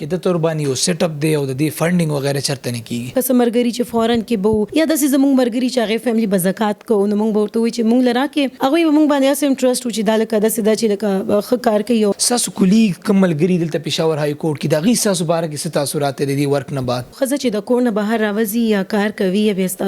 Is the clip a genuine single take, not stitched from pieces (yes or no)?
no